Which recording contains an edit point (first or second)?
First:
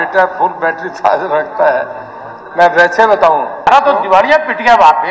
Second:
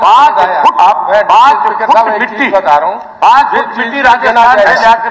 first